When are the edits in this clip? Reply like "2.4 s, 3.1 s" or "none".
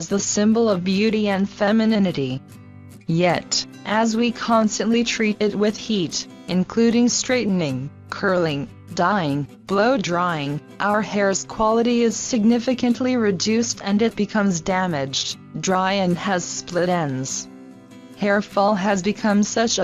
8.9 s